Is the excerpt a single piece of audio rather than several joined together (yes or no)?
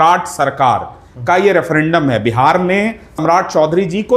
no